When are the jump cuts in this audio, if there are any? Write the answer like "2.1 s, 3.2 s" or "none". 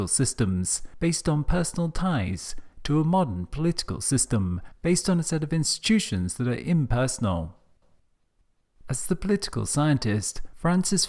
none